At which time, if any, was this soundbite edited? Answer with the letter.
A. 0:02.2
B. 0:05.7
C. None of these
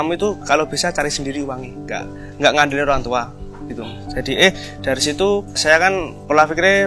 B